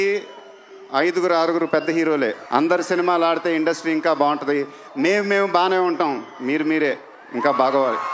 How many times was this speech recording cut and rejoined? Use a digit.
0